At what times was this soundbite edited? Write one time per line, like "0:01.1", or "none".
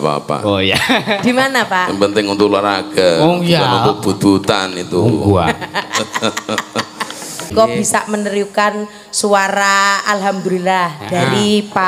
0:07.5